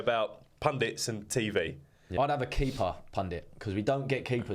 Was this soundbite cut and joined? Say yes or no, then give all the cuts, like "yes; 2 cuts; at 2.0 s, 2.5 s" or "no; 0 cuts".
yes; 1 cut; at 2.0 s